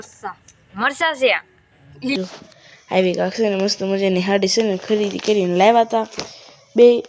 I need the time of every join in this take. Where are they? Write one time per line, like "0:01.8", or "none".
0:02.2